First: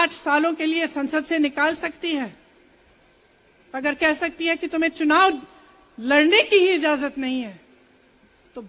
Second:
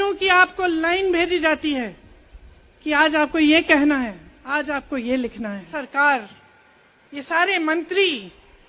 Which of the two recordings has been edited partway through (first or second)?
second